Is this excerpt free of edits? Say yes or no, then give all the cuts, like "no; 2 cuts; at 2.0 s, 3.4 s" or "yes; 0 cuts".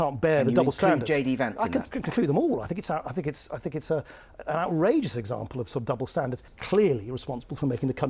no; 1 cut; at 6.5 s